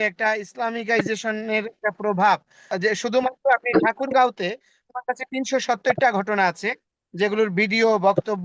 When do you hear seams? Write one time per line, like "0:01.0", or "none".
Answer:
0:02.7